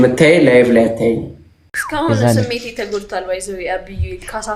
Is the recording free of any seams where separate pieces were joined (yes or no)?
no